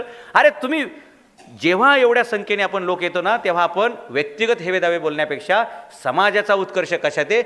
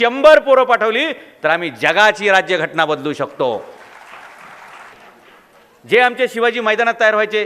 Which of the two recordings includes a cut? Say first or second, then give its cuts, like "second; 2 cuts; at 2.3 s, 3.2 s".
second; 1 cut; at 4.9 s